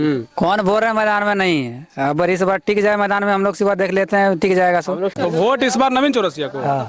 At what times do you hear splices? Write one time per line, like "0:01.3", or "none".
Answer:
0:05.1

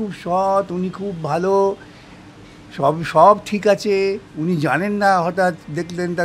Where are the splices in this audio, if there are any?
none

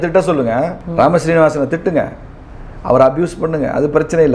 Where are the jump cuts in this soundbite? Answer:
none

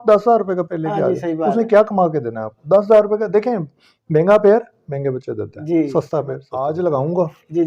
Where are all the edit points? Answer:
0:06.5

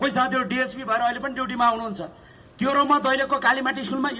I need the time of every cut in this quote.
none

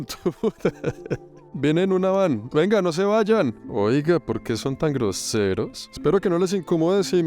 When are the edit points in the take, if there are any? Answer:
0:01.4

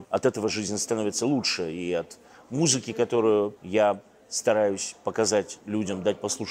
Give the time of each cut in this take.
0:03.6
0:05.6

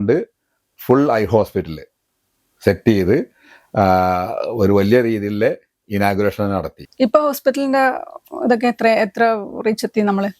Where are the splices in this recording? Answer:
none

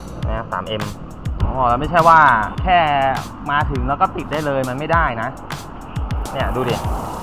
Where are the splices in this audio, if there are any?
0:01.4
0:02.5

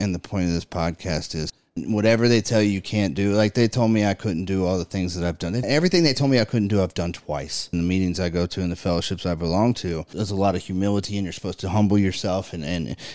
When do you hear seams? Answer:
0:01.8
0:05.6
0:07.7
0:10.1

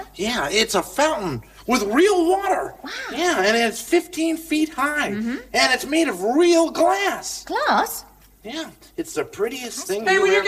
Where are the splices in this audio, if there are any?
0:08.7

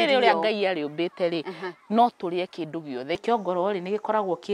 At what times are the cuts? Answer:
0:03.2

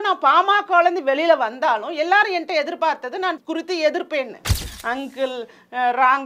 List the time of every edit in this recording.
0:03.4
0:04.7

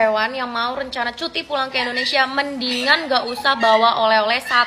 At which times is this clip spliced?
none

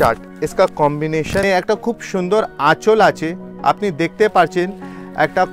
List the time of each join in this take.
0:01.4

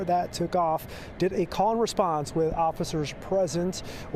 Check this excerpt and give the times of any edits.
none

